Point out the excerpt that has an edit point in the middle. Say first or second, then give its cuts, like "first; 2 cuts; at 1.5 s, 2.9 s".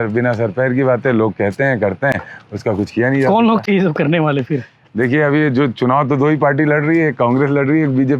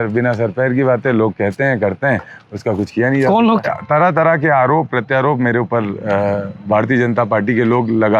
second; 1 cut; at 3.6 s